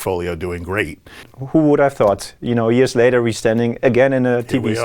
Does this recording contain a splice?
yes; 1 cut; at 1.3 s

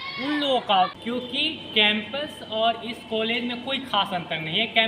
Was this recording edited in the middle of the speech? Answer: yes; 1 cut; at 1.0 s

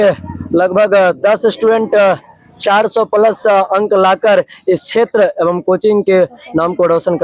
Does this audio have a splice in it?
no; 0 cuts

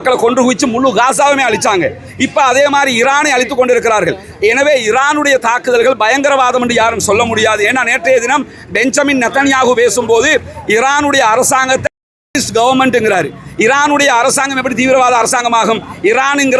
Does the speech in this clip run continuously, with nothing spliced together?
yes; 0 cuts

